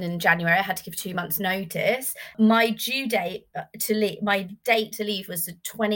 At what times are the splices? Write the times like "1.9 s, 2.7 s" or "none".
2.3 s